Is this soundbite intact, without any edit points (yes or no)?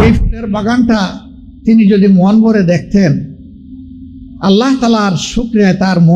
yes